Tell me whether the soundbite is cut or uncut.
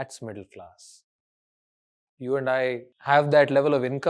cut